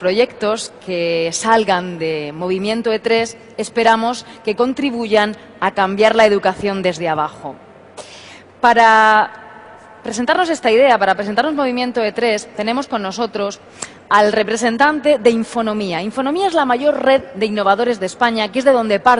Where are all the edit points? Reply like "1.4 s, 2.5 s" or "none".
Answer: 12.9 s